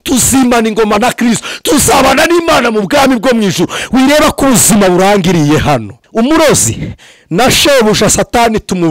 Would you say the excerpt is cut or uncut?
cut